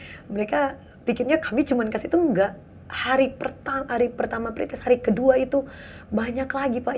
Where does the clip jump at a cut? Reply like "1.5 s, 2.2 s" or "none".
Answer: none